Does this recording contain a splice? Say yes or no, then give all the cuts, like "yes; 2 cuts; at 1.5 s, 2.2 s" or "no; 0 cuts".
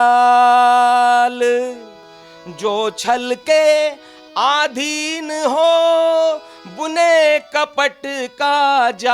no; 0 cuts